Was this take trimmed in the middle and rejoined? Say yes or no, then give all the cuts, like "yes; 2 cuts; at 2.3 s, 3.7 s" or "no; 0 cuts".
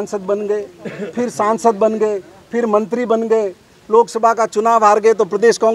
no; 0 cuts